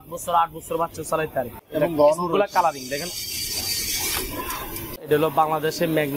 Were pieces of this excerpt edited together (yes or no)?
yes